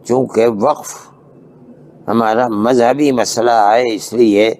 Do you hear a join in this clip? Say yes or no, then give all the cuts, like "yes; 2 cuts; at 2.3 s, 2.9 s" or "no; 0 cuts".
no; 0 cuts